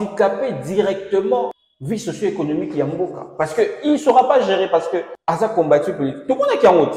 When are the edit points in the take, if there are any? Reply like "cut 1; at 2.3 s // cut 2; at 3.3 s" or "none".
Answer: cut 1; at 1.7 s // cut 2; at 5.1 s